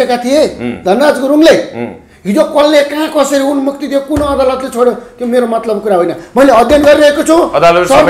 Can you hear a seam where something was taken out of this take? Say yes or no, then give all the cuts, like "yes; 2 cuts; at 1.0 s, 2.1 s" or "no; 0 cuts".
no; 0 cuts